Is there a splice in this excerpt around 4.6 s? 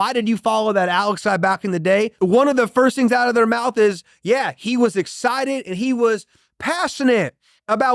no; 1 cut; at 2.1 s

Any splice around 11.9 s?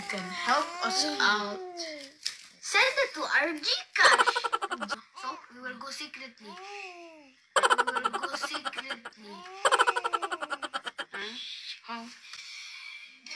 no; 3 cuts; at 5.0 s, 7.5 s, 8.9 s

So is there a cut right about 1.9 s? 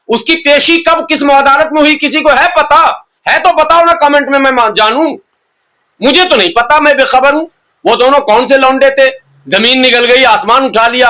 no; 0 cuts

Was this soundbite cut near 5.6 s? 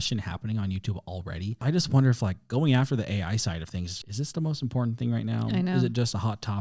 no; 2 cuts; at 1.6 s, 4.0 s

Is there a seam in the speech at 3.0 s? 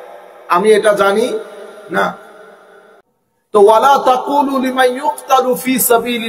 yes; 1 cut; at 3.0 s

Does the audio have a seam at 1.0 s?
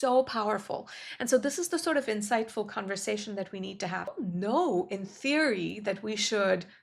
no; 1 cut; at 4.1 s

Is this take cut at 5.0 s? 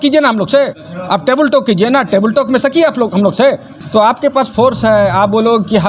no; 1 cut; at 3.7 s

